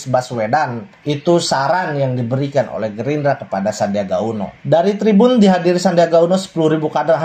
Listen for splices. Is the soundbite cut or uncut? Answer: uncut